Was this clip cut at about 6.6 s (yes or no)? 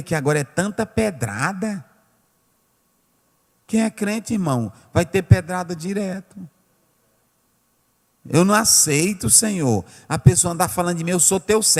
no